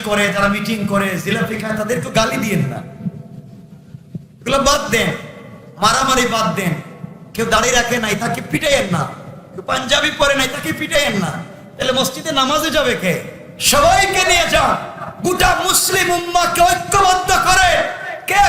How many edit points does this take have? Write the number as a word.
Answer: zero